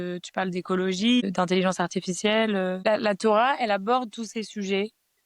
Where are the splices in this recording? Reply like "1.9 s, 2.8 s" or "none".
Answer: 1.2 s, 2.8 s